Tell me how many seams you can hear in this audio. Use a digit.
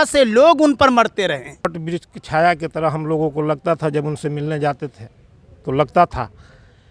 1